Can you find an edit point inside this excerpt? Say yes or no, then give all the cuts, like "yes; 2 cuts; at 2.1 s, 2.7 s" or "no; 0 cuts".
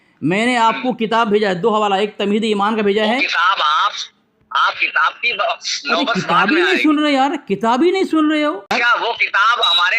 yes; 1 cut; at 8.8 s